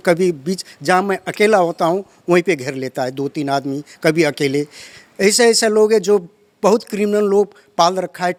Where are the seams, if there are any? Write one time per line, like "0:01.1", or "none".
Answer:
none